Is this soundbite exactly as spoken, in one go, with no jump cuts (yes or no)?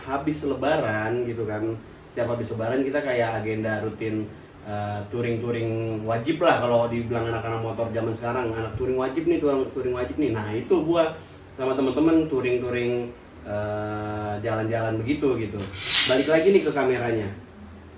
yes